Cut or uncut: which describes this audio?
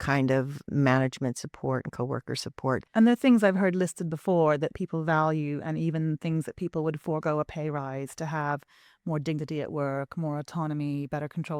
cut